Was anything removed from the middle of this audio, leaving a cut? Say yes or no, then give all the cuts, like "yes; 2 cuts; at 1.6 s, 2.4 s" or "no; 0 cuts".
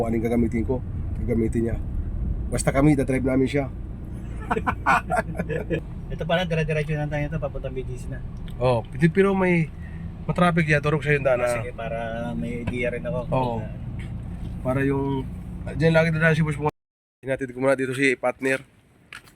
yes; 2 cuts; at 6.0 s, 16.7 s